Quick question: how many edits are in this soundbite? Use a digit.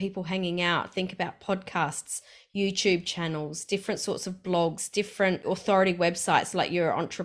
1